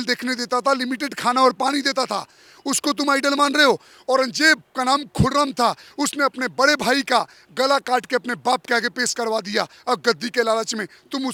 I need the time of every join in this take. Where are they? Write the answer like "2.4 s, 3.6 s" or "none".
none